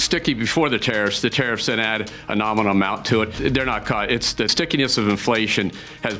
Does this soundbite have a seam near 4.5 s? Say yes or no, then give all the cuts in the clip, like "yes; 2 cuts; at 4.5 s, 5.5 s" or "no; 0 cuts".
yes; 2 cuts; at 3.3 s, 4.5 s